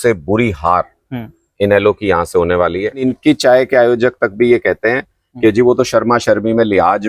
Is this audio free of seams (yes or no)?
no